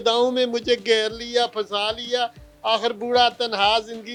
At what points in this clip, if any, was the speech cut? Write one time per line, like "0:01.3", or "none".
none